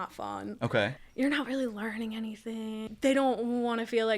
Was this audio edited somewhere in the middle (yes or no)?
yes